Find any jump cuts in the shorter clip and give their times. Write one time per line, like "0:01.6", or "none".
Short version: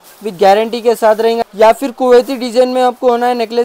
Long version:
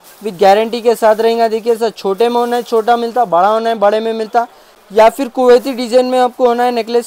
0:01.4